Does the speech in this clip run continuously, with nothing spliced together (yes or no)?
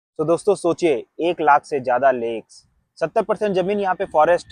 yes